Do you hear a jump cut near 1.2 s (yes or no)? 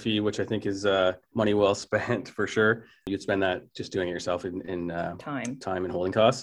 yes